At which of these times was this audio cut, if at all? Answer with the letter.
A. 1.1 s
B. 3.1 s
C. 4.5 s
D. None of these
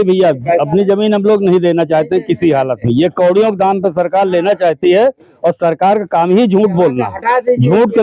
D